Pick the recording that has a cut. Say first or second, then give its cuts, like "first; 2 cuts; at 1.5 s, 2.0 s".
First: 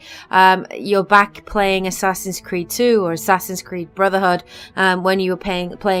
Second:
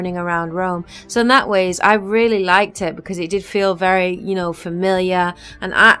second; 1 cut; at 1.4 s